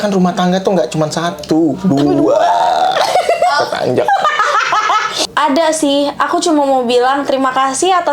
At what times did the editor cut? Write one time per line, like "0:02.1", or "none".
0:05.1